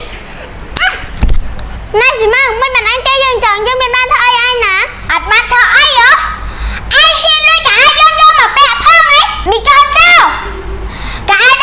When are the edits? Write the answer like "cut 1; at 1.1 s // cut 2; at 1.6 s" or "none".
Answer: cut 1; at 1.8 s